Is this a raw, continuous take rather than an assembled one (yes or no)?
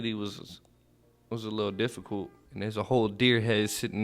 no